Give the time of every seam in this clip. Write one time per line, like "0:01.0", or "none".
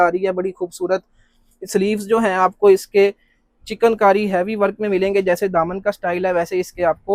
none